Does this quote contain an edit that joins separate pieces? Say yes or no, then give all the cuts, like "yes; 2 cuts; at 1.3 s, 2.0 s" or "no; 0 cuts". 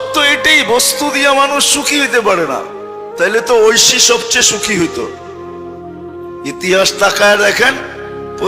yes; 2 cuts; at 5.1 s, 6.5 s